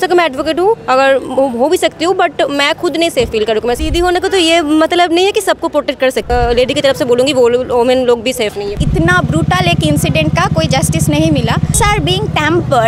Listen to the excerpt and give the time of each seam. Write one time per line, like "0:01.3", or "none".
0:03.8
0:06.3
0:08.8
0:11.7